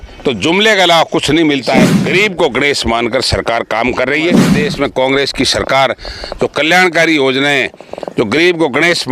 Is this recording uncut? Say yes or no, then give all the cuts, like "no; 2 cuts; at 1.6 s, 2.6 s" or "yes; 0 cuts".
no; 2 cuts; at 2.0 s, 4.5 s